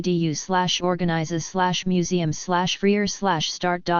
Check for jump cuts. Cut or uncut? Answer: cut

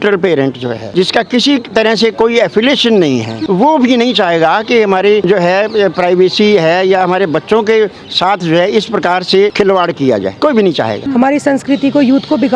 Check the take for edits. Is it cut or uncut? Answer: cut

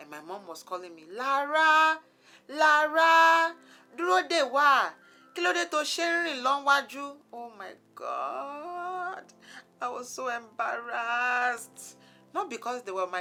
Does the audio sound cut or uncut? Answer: uncut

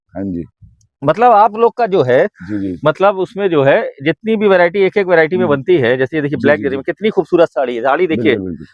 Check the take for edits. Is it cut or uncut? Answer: uncut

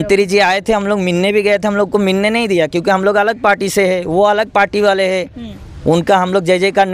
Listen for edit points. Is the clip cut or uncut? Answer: uncut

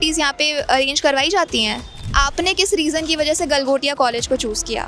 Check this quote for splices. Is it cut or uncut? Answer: cut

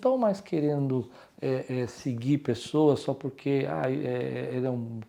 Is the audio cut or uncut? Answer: uncut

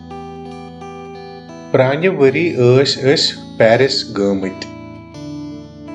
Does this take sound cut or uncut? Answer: uncut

